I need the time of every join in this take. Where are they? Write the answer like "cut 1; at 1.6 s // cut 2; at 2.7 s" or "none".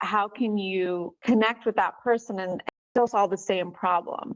cut 1; at 1.1 s // cut 2; at 2.7 s

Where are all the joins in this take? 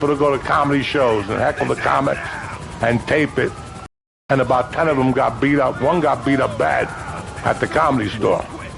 none

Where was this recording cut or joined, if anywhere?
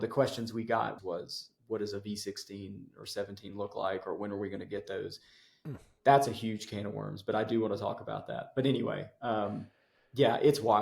cut 1; at 1.0 s

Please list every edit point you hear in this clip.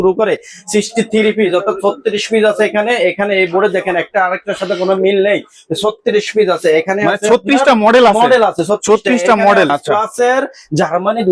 cut 1; at 9.7 s

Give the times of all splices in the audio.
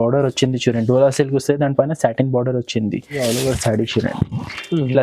cut 1; at 3.1 s

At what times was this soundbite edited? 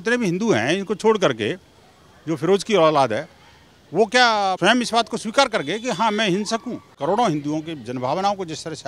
cut 1; at 4.6 s // cut 2; at 6.9 s

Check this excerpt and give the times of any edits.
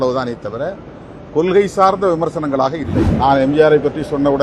cut 1; at 3.0 s

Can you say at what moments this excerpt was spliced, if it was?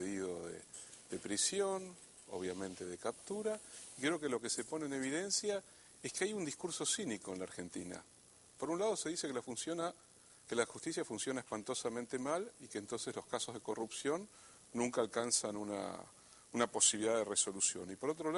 none

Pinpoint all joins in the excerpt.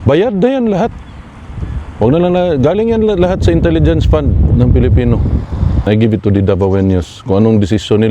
cut 1; at 5.9 s

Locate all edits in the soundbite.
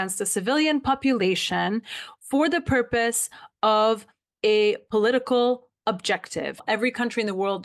cut 1; at 6.6 s

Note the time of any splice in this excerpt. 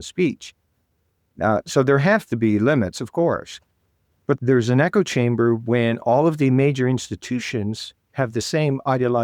cut 1; at 4.4 s

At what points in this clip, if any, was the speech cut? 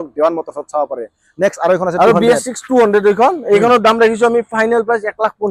none

